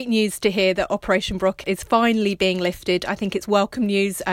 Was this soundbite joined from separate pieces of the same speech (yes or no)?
yes